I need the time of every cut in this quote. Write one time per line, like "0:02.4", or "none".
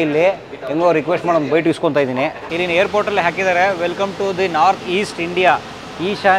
0:02.4